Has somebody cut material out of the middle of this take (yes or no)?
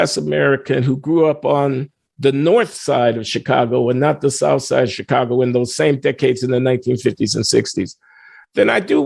no